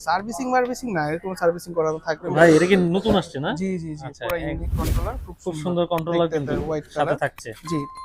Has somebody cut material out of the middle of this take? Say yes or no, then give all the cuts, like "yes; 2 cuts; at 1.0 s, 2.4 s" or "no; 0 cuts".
yes; 1 cut; at 2.3 s